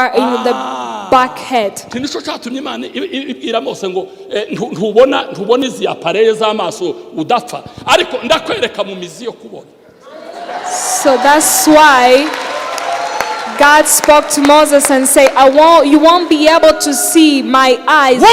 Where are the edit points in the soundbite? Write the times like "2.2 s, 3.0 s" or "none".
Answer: none